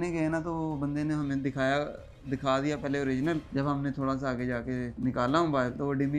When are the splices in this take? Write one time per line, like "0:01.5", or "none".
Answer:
0:03.5
0:04.9

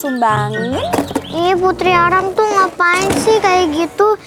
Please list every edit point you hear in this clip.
0:01.3

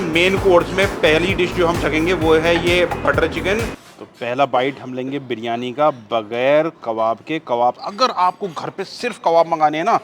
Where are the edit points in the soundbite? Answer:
0:03.8
0:07.8

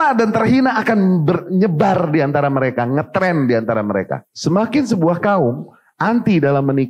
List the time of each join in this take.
0:04.2

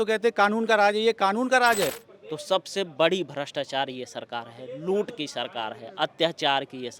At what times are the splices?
0:02.1

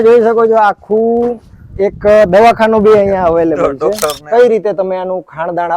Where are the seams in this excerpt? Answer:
0:04.2

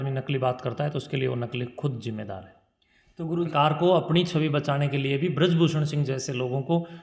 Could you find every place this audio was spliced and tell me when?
0:03.5

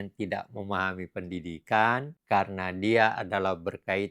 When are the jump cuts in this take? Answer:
0:02.1

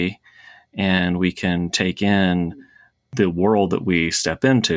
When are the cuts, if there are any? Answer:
0:03.1

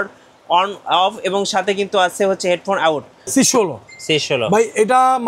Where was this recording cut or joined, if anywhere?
0:03.2

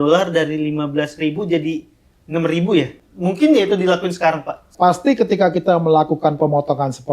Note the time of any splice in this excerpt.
0:03.0
0:04.7

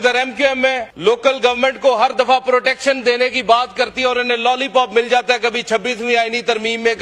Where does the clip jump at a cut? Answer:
0:00.9

